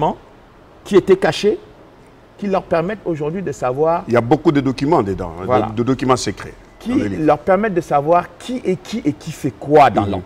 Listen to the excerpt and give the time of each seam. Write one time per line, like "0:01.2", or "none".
none